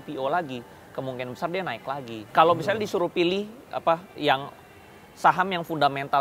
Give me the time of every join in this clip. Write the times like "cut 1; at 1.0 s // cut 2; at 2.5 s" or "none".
cut 1; at 2.3 s